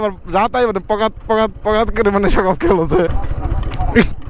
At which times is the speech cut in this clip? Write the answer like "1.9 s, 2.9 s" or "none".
3.1 s